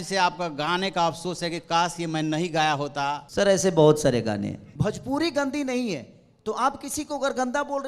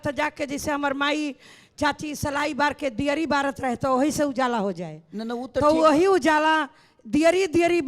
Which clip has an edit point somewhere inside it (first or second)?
first